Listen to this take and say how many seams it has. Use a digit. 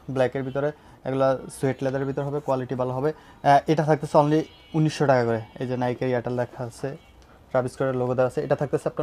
0